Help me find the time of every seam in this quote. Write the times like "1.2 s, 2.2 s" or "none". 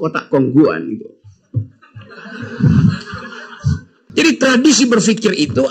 3.9 s